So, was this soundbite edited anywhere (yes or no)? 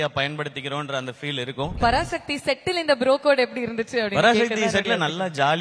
yes